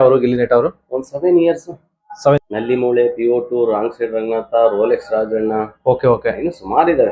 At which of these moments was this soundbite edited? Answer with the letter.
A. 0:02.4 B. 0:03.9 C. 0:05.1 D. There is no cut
A